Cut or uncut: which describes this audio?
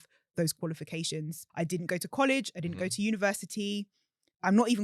cut